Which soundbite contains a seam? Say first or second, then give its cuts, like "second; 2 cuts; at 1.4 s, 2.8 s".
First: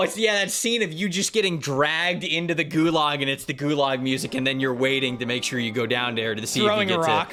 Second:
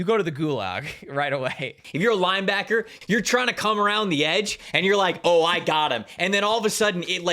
second; 2 cuts; at 1.7 s, 2.9 s